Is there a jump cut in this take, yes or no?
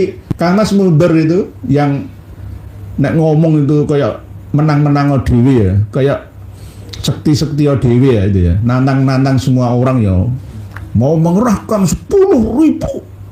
no